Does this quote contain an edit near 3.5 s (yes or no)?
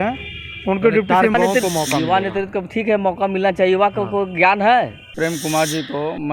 no